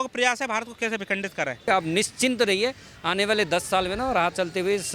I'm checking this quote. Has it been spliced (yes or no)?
yes